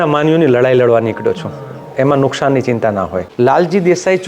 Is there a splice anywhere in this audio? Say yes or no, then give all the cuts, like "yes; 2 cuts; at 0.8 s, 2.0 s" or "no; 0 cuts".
yes; 1 cut; at 3.2 s